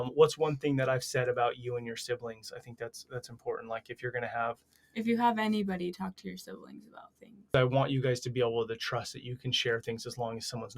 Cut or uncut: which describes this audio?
cut